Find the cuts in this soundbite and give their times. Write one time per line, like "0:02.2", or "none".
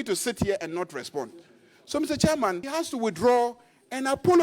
0:02.6